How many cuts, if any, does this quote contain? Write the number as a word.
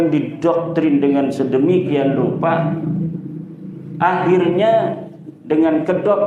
zero